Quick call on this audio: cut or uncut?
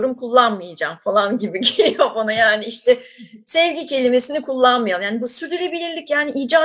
uncut